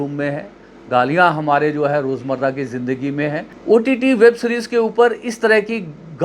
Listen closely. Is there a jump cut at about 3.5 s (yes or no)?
yes